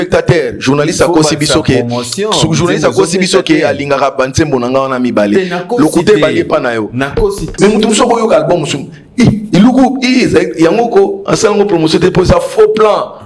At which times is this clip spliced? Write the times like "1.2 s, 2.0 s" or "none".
7.4 s